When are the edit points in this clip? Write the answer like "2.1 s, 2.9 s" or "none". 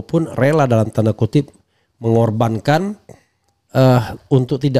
none